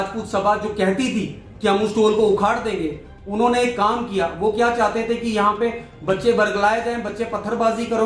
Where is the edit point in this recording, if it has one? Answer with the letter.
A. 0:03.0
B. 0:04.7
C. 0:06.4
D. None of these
D